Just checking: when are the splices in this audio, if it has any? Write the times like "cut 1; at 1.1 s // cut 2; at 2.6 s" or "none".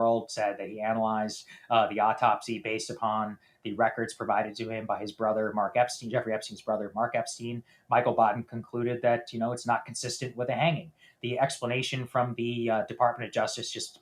none